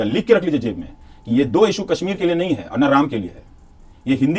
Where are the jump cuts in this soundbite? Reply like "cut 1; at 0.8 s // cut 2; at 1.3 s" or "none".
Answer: none

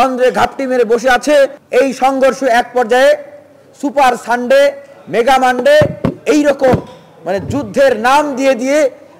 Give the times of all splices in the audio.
cut 1; at 1.6 s

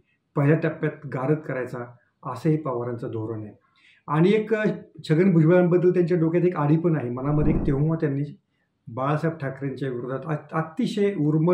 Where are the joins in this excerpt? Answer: cut 1; at 7.6 s

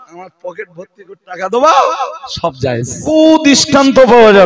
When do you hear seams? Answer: cut 1; at 3.1 s

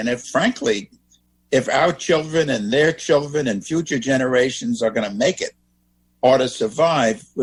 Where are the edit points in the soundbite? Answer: none

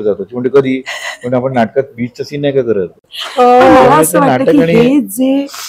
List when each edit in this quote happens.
none

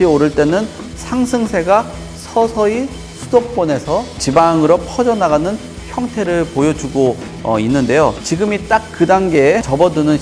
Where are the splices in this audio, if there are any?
none

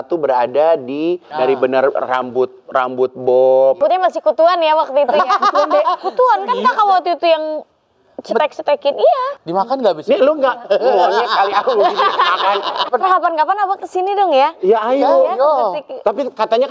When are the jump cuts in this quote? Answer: cut 1; at 1.3 s // cut 2; at 3.8 s // cut 3; at 9.4 s // cut 4; at 12.8 s

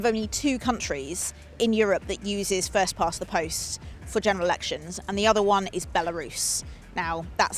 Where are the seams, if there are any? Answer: none

